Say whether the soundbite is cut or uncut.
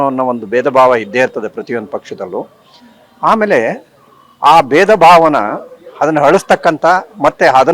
uncut